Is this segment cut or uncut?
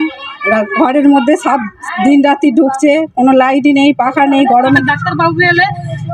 cut